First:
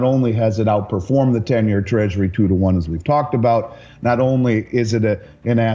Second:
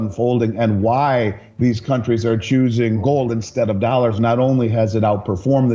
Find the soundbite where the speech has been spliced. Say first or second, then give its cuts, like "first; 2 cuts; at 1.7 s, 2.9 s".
second; 1 cut; at 3.0 s